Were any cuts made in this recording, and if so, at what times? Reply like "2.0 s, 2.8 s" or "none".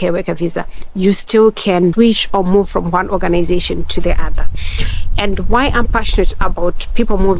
1.9 s